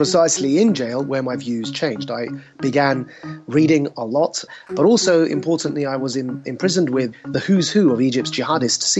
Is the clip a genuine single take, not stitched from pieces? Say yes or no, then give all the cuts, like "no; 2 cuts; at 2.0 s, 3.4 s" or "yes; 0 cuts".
no; 2 cuts; at 4.6 s, 7.1 s